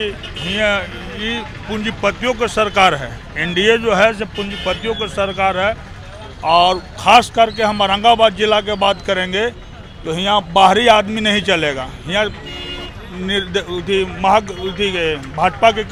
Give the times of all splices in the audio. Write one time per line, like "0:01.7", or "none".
none